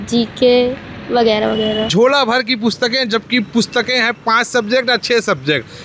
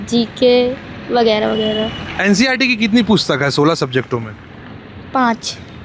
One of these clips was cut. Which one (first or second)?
first